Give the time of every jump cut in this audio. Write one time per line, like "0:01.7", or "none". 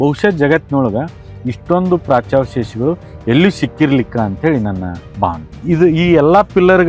0:05.5

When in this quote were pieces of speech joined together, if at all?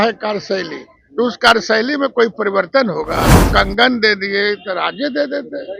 0:03.5

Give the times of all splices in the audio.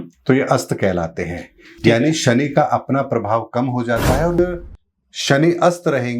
0:04.4

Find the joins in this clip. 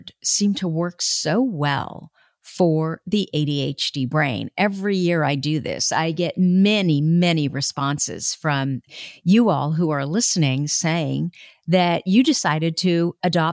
none

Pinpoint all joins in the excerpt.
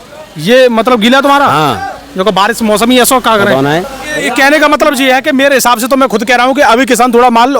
0:04.2

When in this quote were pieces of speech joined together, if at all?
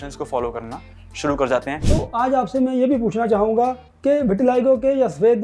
0:01.8

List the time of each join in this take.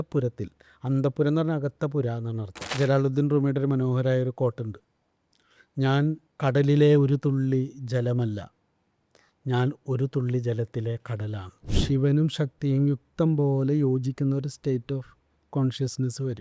0:02.6
0:06.3
0:11.7

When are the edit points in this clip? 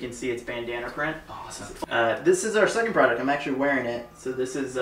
0:01.8

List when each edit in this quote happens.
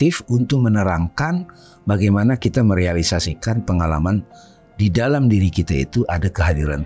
none

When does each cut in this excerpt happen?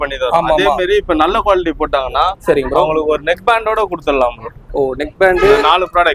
none

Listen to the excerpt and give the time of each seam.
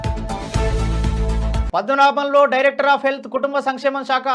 0:01.6

